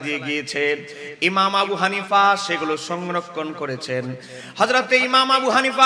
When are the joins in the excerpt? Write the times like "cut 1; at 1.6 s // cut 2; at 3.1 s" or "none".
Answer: none